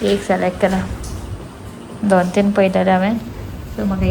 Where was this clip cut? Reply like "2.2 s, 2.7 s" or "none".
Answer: none